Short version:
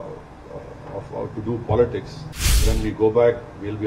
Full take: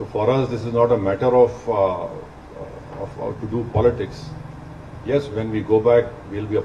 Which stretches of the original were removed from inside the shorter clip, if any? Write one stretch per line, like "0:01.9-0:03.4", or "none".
0:04.7-0:05.3